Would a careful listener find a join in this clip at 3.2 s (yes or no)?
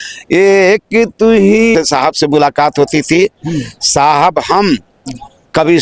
no